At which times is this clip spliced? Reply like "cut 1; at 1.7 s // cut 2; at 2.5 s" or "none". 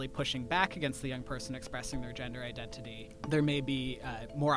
cut 1; at 3.1 s